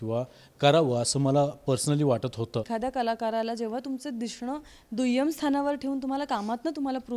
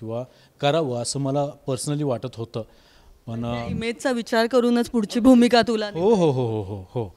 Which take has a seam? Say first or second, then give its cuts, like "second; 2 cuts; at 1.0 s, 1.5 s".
first; 1 cut; at 2.7 s